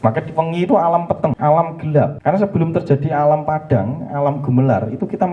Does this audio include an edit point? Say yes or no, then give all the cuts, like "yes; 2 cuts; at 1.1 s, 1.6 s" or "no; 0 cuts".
yes; 2 cuts; at 1.4 s, 2.2 s